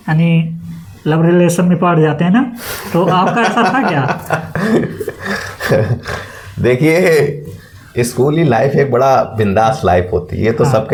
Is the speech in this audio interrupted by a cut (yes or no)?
no